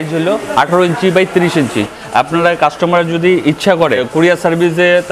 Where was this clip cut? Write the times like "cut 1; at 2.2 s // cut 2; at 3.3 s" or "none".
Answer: cut 1; at 1.9 s // cut 2; at 4.0 s